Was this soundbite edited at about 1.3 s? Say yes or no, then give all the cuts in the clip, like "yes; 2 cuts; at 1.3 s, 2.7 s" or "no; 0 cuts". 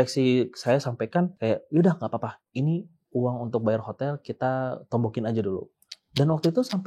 yes; 1 cut; at 1.3 s